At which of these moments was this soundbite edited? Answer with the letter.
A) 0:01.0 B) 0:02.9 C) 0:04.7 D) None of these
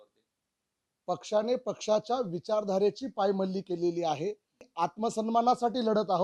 C